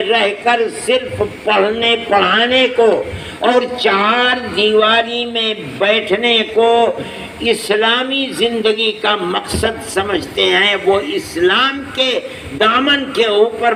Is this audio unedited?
yes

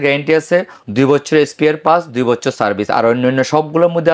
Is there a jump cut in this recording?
no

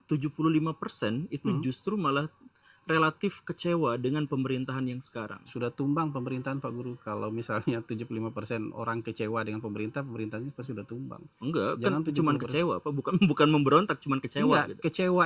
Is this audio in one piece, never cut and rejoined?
yes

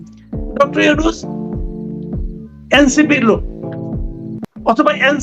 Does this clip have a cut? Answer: yes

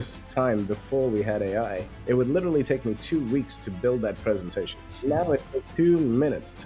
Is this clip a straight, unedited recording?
no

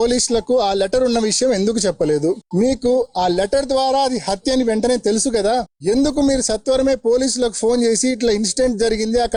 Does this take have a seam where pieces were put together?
no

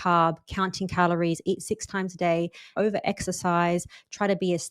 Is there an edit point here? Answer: yes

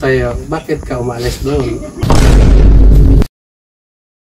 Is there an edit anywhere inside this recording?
yes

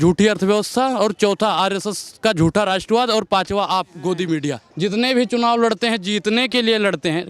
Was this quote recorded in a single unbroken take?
no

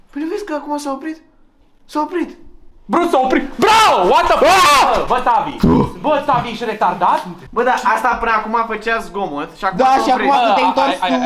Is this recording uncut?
yes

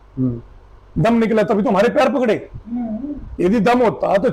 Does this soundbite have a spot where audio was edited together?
no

